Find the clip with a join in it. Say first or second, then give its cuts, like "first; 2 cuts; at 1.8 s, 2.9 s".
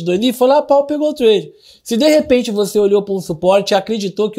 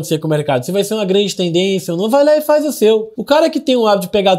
second; 1 cut; at 3.1 s